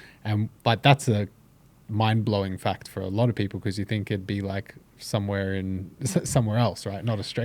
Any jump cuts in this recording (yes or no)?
no